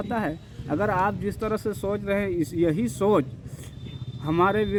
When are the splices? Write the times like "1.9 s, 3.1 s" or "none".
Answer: none